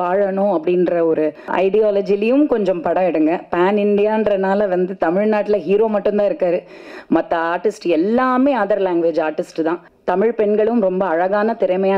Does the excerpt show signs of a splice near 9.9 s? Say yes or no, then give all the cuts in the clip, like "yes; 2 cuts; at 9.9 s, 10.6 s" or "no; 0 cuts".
yes; 2 cuts; at 1.5 s, 9.9 s